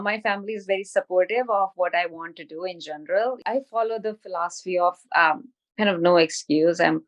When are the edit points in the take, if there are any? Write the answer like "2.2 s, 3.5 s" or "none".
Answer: 3.4 s

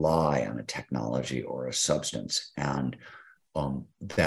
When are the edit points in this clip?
none

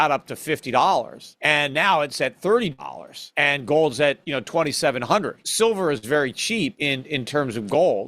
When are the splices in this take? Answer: 1.2 s, 5.4 s, 6.8 s

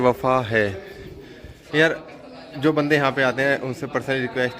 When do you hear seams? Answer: 1.6 s

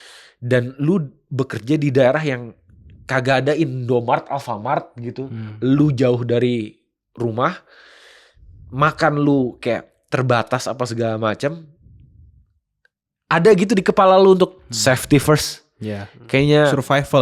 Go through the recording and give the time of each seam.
none

